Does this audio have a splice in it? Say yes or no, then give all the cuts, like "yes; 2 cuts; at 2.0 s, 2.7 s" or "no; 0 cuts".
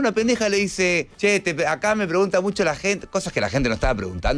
yes; 1 cut; at 1.1 s